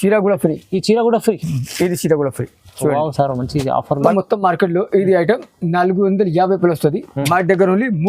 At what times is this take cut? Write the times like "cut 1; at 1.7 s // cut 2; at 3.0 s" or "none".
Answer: cut 1; at 4.1 s